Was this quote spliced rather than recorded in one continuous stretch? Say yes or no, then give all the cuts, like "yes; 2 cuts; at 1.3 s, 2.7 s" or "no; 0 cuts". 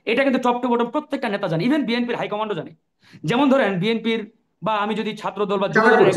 no; 0 cuts